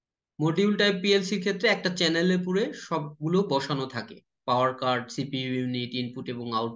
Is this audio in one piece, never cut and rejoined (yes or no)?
yes